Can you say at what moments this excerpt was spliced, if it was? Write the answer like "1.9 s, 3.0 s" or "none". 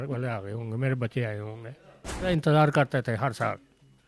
2.3 s